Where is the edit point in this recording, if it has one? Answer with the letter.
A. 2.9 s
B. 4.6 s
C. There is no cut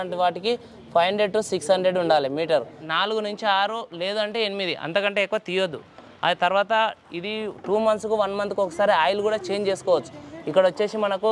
A